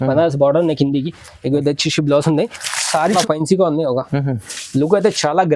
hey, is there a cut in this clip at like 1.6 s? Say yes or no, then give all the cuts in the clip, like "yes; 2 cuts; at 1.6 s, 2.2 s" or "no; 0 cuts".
no; 1 cut; at 3.1 s